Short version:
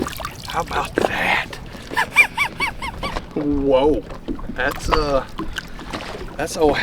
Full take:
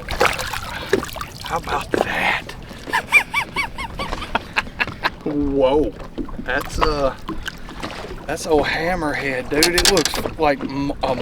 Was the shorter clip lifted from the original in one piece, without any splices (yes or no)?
no